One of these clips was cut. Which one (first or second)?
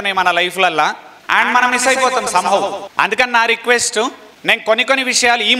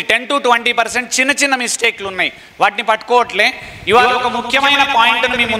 first